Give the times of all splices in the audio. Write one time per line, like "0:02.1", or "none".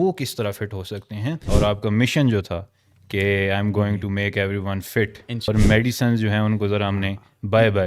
0:01.4
0:05.5